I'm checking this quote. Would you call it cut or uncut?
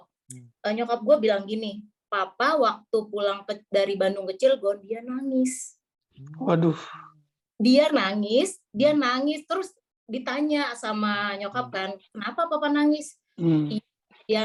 uncut